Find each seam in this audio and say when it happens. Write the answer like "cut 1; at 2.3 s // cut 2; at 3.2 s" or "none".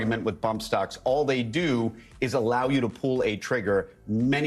none